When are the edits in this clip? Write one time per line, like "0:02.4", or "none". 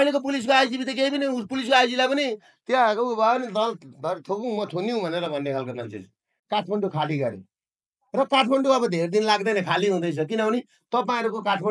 0:06.3